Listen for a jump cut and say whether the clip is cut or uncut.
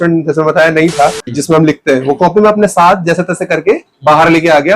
cut